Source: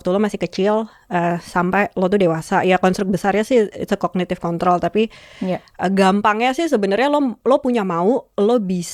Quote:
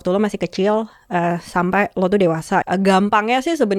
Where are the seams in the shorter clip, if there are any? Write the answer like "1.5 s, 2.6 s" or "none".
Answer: 2.6 s